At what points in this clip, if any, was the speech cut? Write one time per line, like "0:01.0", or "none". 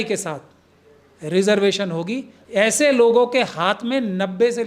0:02.3